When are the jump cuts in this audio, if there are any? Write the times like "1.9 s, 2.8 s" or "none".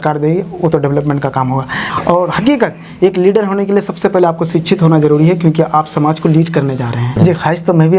1.8 s, 7.2 s